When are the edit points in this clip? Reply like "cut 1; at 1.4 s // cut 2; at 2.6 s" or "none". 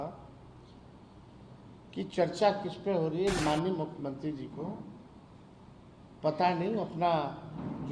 cut 1; at 3.4 s